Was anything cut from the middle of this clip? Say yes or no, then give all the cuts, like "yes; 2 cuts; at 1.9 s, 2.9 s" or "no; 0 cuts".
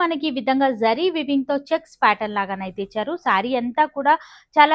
no; 0 cuts